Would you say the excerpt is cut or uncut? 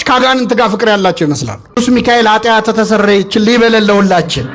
cut